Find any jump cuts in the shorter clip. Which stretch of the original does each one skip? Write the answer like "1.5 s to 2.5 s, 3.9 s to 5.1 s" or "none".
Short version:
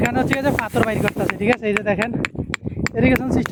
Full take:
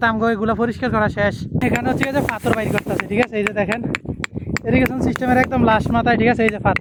none